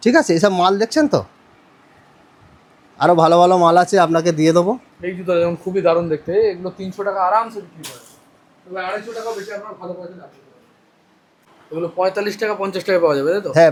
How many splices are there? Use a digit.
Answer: 0